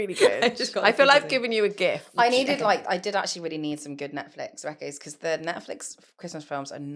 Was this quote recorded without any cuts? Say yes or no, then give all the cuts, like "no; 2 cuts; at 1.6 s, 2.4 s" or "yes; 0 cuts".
yes; 0 cuts